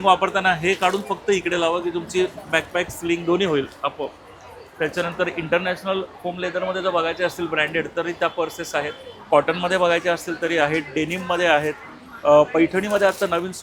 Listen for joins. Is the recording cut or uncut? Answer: uncut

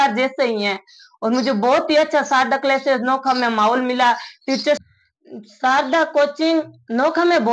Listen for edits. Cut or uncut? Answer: cut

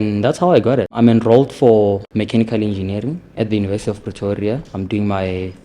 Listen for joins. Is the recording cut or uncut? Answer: cut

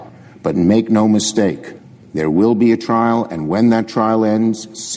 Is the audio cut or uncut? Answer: uncut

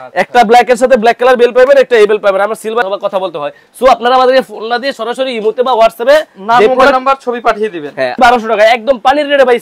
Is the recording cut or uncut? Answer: cut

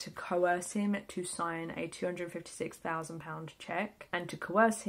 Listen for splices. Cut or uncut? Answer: uncut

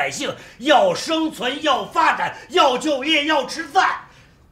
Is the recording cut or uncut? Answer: uncut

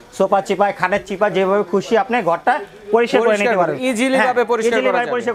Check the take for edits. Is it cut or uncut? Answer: uncut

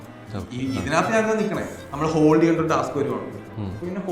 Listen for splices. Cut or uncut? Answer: cut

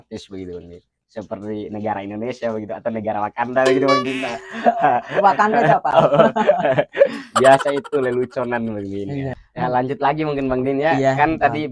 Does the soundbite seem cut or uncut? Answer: cut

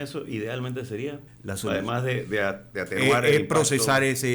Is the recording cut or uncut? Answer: cut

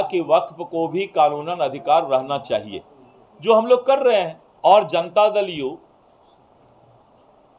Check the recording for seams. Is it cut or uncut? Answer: cut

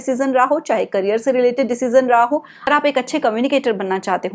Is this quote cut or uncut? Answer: cut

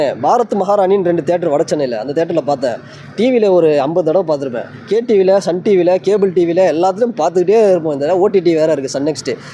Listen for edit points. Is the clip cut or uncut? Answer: uncut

